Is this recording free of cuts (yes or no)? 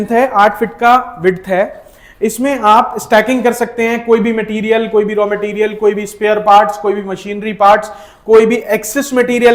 yes